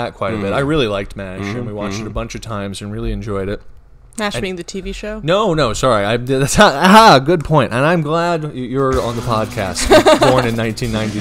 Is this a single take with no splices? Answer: yes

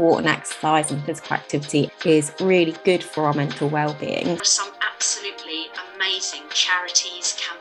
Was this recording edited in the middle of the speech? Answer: no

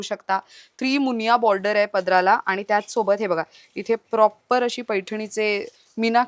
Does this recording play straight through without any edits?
yes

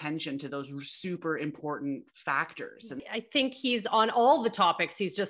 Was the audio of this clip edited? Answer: yes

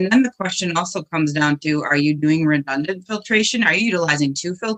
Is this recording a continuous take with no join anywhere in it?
yes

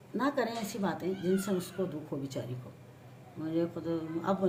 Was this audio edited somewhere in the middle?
no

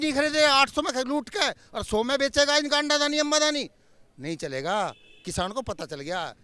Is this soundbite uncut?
yes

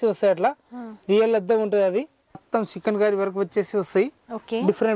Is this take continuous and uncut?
no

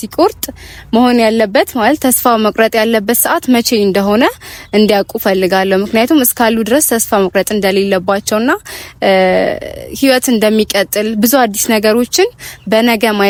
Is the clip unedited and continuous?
yes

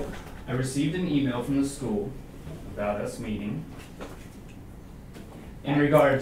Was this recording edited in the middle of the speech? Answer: no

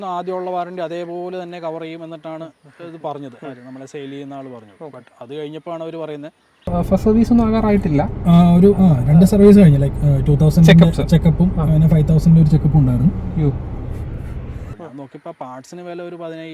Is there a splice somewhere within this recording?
yes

